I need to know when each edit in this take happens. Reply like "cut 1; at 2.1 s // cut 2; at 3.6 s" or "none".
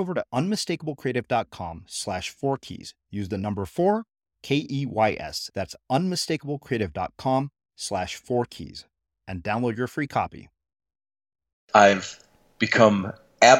cut 1; at 11.6 s